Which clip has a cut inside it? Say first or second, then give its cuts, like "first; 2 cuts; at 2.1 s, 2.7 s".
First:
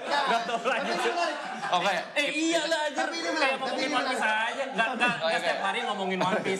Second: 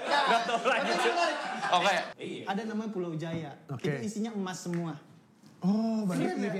second; 1 cut; at 2.1 s